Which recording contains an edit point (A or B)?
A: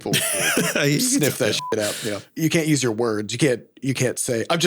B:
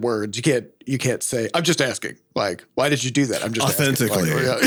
A